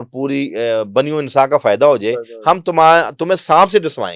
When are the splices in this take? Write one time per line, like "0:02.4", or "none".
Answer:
none